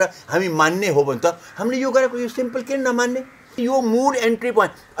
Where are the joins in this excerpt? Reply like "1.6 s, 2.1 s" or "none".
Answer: 3.4 s